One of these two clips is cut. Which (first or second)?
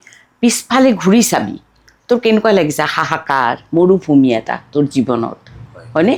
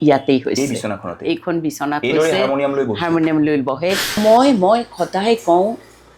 second